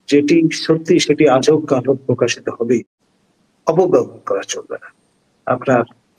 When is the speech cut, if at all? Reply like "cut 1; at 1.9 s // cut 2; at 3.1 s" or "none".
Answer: cut 1; at 3.0 s